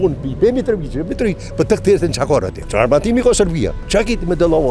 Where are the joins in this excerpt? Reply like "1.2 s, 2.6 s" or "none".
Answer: 2.6 s, 3.8 s